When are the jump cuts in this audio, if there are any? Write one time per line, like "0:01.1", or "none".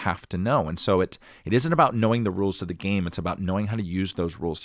none

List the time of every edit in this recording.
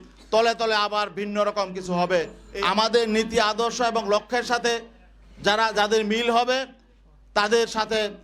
0:02.4

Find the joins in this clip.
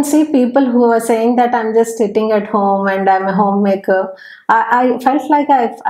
none

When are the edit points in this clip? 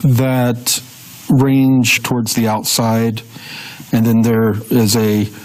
none

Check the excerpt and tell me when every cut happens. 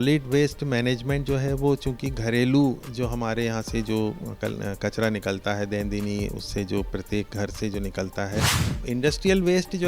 0:08.6

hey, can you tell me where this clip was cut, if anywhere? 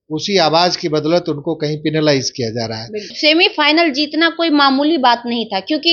0:03.1

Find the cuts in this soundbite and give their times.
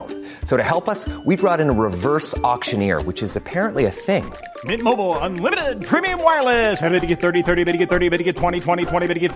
none

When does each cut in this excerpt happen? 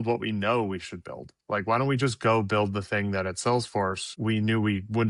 none

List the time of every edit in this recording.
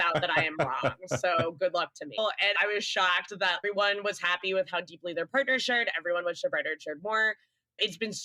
0:02.2
0:03.6

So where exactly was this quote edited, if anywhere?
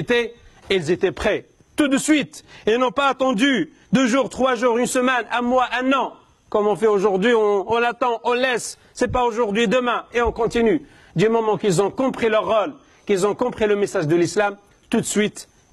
none

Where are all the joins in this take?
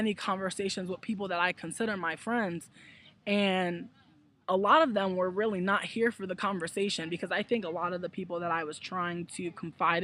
0:00.9

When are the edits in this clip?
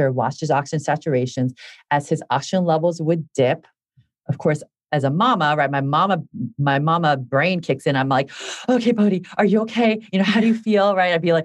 none

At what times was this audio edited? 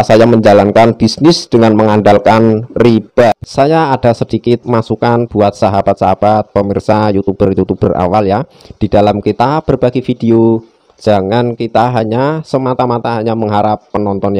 0:03.4

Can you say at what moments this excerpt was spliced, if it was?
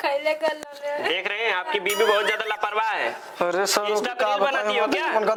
none

